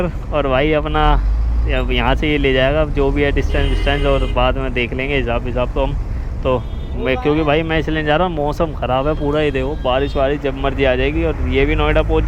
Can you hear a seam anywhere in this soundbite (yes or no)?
no